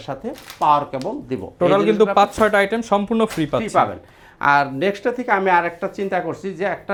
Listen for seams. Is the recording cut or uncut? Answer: uncut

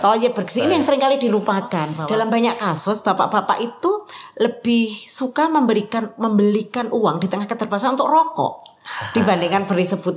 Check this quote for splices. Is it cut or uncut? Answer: cut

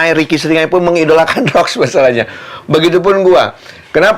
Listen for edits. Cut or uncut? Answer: uncut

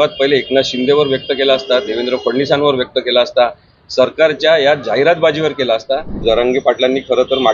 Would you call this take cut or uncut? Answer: cut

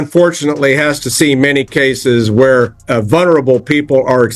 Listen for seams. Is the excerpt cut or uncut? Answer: cut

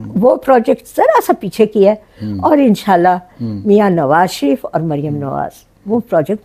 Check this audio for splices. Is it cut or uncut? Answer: uncut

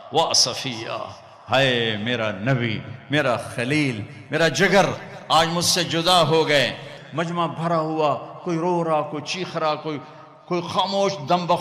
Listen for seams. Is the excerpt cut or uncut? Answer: cut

